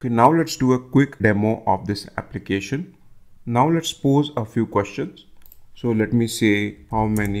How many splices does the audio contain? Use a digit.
1